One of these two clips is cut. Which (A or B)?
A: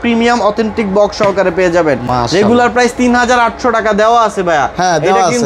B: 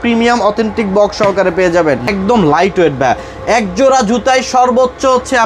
B